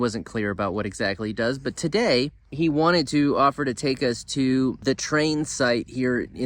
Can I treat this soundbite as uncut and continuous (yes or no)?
no